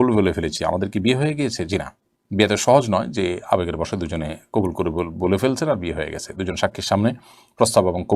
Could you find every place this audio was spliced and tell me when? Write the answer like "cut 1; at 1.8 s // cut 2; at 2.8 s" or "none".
none